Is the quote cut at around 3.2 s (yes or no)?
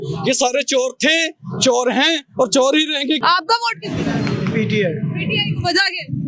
yes